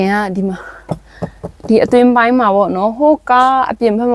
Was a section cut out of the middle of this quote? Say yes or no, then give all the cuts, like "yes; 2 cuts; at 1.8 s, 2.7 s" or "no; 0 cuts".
no; 0 cuts